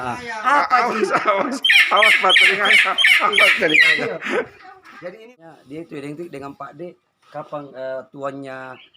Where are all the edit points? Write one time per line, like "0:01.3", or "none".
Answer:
0:05.0